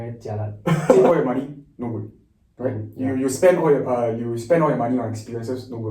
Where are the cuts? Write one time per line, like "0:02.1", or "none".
0:00.9